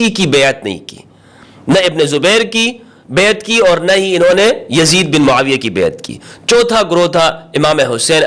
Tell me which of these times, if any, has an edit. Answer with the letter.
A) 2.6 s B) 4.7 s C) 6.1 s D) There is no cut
D